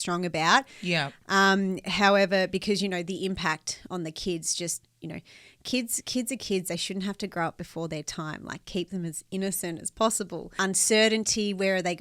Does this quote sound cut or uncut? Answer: cut